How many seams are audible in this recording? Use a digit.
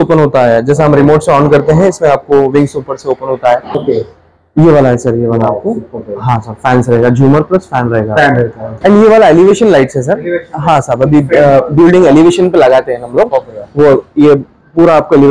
2